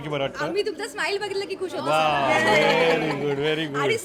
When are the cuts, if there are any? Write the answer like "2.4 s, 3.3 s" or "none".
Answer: none